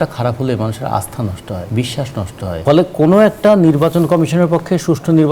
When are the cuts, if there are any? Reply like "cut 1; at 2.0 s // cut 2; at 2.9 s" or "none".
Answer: cut 1; at 2.5 s